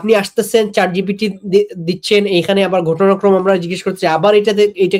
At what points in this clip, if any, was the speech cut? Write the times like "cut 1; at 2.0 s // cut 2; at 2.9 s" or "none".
none